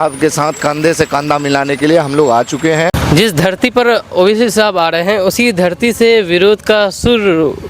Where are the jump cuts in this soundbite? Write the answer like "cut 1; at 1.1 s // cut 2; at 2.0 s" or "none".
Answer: cut 1; at 3.0 s